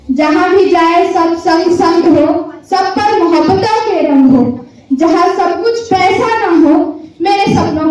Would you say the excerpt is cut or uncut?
uncut